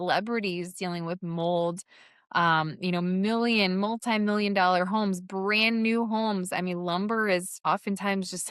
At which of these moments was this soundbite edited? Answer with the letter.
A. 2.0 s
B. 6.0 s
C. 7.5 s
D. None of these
C